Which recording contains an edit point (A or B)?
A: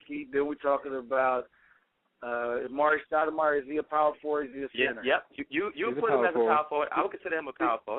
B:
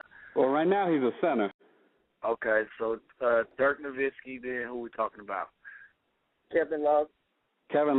A